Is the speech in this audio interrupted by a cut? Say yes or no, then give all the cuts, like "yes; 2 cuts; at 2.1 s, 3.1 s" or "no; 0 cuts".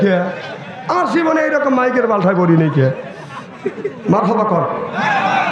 no; 0 cuts